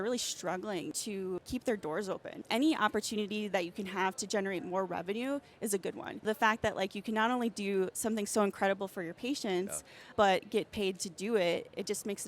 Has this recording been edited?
yes; 4 cuts; at 1.1 s, 2.4 s, 6.2 s, 10.1 s

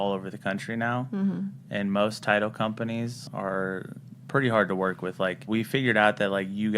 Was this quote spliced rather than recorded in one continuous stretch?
yes; 2 cuts; at 3.2 s, 5.5 s

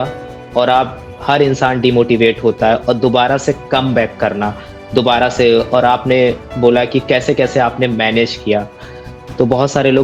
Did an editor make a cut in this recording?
no; 0 cuts

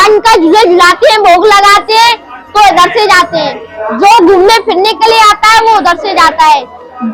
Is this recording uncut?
yes; 0 cuts

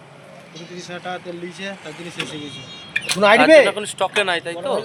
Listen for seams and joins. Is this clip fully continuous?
yes; 0 cuts

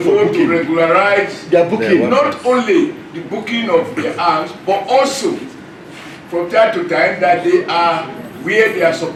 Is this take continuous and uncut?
yes; 0 cuts

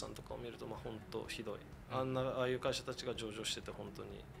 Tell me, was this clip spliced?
no; 0 cuts

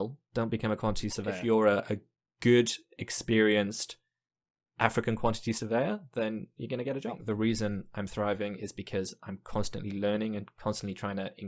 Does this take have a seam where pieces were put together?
yes; 2 cuts; at 1.4 s, 7.1 s

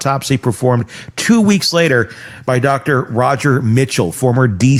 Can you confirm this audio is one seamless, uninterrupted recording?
yes; 0 cuts

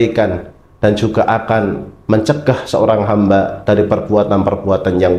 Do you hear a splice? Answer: no; 0 cuts

